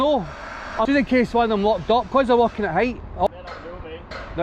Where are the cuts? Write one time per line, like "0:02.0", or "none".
0:00.9
0:03.3